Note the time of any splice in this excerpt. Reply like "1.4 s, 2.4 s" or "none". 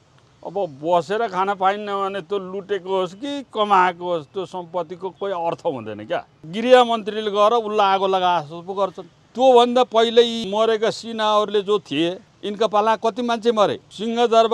6.5 s